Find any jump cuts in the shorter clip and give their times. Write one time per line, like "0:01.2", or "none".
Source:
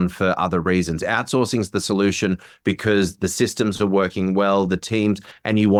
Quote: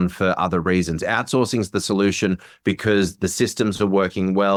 none